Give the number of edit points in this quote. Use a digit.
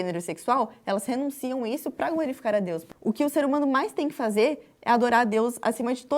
1